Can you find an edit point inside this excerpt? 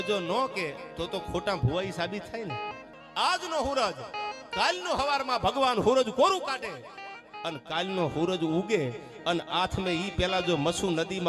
yes; 1 cut; at 2.9 s

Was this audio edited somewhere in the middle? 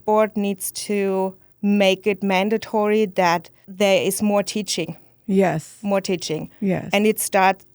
yes; 2 cuts; at 1.4 s, 3.6 s

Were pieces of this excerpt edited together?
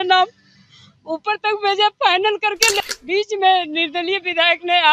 yes; 1 cut; at 2.8 s

